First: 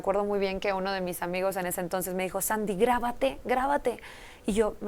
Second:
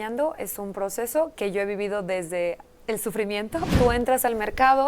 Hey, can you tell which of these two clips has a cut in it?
second; 2 cuts; at 1.3 s, 3.7 s

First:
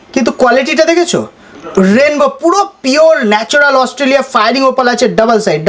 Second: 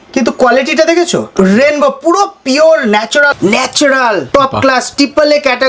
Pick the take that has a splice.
second; 3 cuts; at 1.3 s, 3.3 s, 4.2 s

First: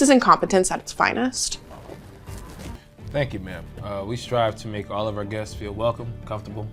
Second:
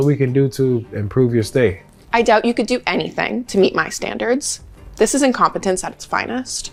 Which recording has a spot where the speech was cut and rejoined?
first; 1 cut; at 2.8 s

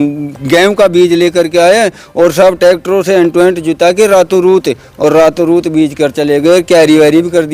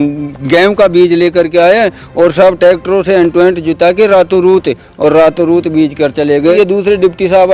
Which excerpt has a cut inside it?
second; 1 cut; at 6.5 s

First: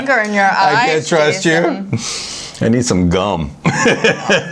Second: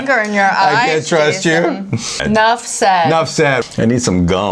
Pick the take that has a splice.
second; 2 cuts; at 2.2 s, 3.6 s

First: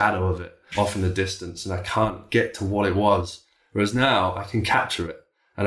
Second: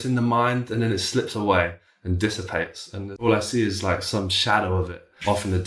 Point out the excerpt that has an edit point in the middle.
second; 1 cut; at 3.2 s

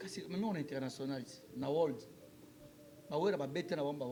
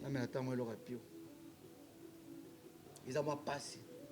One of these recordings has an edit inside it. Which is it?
second; 1 cut; at 2.9 s

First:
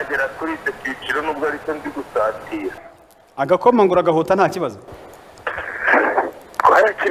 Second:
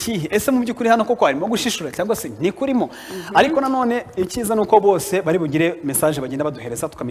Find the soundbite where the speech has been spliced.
first; 1 cut; at 2.7 s

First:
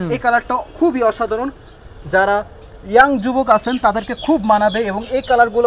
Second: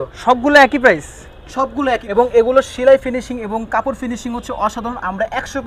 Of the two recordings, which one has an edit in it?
second; 1 cut; at 2.1 s

